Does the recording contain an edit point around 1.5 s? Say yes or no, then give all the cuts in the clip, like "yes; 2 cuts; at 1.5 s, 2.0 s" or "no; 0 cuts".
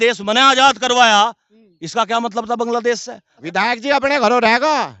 no; 1 cut; at 3.4 s